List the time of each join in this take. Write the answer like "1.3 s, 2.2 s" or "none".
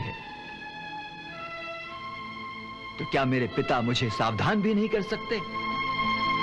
none